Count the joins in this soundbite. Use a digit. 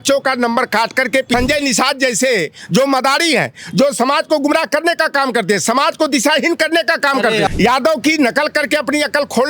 2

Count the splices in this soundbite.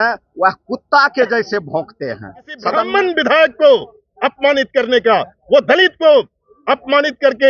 1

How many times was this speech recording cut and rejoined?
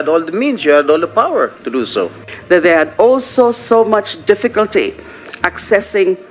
1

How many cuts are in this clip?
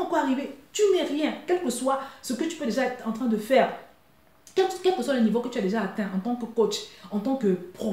0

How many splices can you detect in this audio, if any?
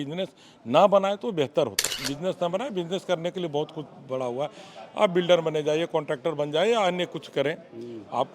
1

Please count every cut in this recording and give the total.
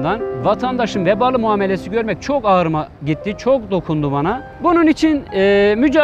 1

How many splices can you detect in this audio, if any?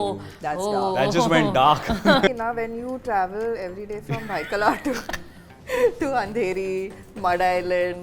1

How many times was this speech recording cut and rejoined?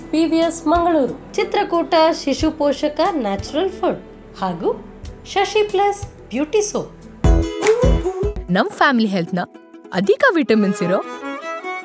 1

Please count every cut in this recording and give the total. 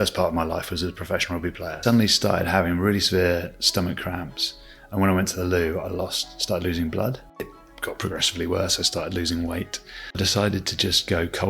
3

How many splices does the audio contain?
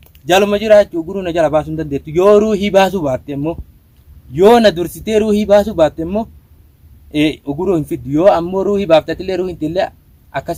0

